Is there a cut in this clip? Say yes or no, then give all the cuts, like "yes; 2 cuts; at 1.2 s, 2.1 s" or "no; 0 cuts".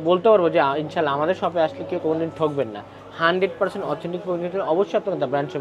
no; 0 cuts